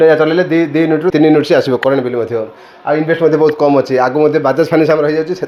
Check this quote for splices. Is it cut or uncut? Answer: uncut